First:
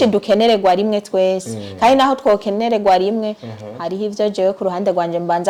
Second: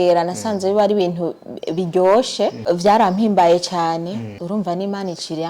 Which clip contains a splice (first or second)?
second